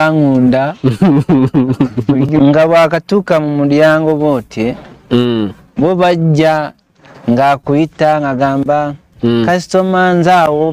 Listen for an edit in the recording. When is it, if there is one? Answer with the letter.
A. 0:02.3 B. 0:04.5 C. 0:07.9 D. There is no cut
A